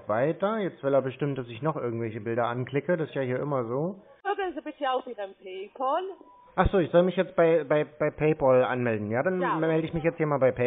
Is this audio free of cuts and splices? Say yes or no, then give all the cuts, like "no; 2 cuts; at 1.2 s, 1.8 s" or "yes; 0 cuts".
no; 1 cut; at 4.3 s